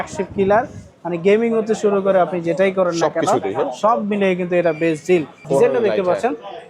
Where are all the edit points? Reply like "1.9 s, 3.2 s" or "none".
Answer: 5.4 s